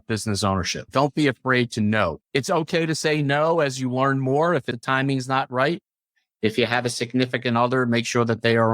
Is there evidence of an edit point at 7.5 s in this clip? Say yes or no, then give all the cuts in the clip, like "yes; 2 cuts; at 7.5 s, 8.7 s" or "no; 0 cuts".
no; 2 cuts; at 2.2 s, 4.8 s